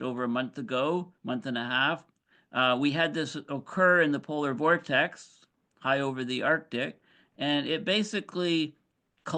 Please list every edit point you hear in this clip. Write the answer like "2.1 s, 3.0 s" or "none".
none